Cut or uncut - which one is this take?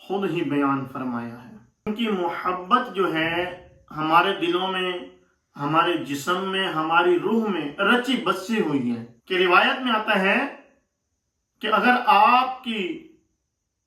cut